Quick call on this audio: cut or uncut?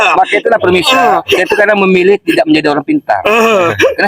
uncut